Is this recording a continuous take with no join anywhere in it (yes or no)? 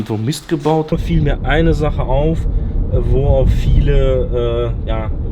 no